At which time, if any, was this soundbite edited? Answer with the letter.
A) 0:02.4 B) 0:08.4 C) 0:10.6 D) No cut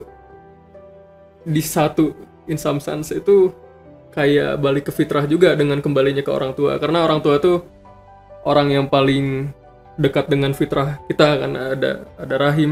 D